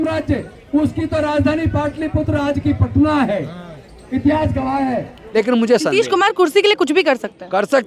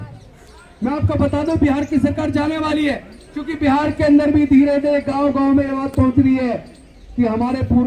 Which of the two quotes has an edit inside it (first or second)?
first